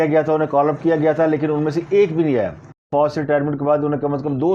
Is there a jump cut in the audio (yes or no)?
yes